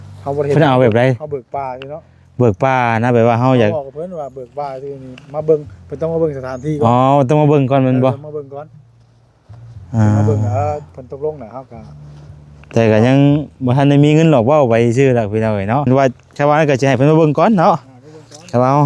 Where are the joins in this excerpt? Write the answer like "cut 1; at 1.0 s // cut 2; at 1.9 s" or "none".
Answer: cut 1; at 15.9 s